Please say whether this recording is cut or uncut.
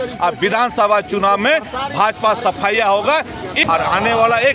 cut